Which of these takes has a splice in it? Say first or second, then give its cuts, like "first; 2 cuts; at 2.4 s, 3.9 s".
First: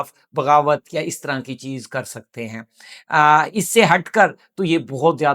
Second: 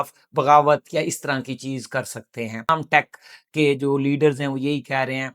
second; 1 cut; at 2.7 s